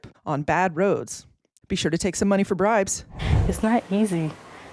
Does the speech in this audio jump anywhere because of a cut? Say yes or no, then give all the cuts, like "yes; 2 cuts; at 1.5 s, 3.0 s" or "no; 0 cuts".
yes; 2 cuts; at 1.5 s, 3.2 s